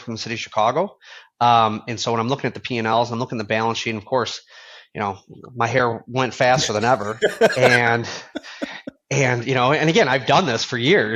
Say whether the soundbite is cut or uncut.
uncut